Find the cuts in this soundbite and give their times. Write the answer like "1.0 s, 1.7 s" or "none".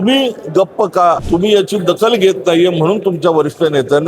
1.2 s